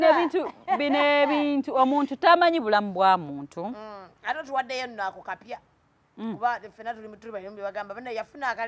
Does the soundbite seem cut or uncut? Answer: uncut